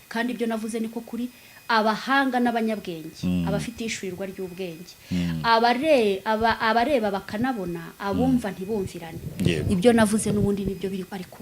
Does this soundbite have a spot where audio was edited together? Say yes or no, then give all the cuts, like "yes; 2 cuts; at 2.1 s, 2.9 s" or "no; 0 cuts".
no; 0 cuts